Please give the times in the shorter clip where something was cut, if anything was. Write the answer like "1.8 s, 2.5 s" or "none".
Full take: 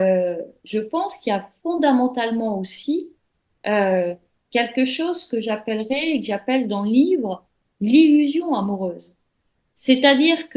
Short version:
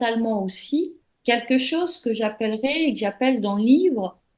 1.1 s